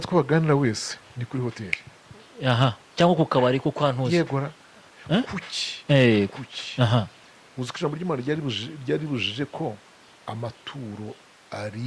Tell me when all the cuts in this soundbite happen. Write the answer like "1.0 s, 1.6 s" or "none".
none